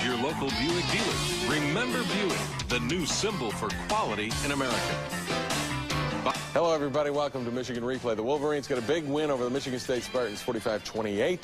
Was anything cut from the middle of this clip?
yes; 1 cut; at 8.3 s

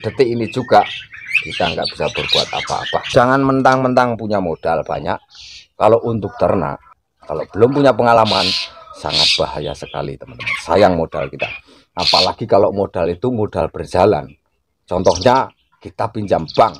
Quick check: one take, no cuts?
no; 2 cuts; at 3.0 s, 6.8 s

